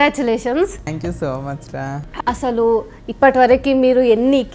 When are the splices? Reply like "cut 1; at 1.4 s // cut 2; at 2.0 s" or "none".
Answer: cut 1; at 0.9 s // cut 2; at 2.0 s